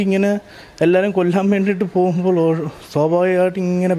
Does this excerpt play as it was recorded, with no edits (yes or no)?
yes